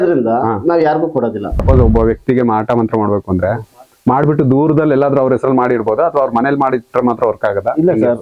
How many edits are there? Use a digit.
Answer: 1